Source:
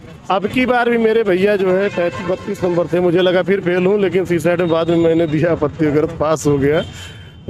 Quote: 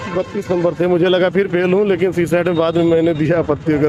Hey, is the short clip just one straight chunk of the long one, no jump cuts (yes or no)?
yes